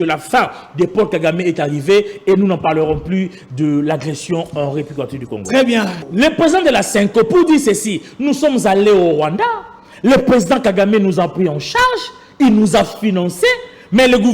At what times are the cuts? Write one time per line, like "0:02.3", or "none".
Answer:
0:06.0